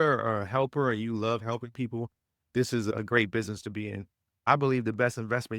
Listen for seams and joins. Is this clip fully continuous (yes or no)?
no